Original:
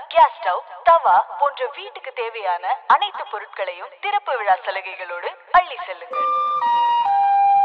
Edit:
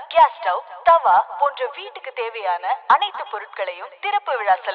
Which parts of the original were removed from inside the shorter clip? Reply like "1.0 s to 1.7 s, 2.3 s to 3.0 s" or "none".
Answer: none